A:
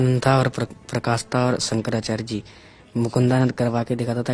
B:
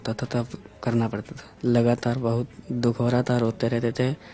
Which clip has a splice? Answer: B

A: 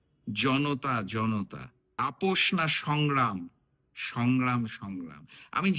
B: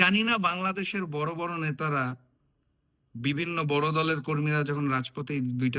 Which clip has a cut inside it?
A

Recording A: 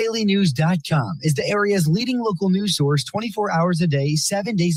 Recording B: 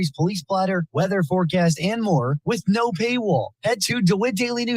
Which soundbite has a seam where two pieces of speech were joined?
B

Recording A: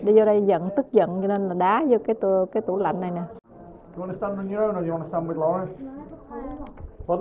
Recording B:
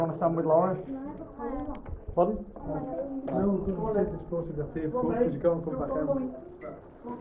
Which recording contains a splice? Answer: A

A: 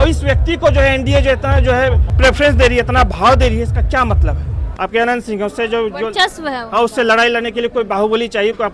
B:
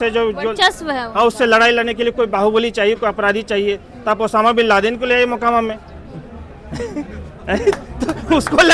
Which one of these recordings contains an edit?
A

